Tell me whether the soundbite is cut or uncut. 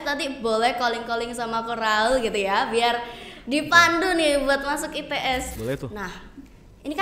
cut